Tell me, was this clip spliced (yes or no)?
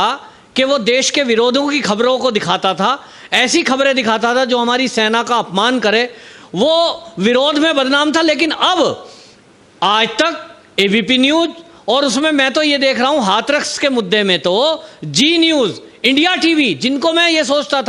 no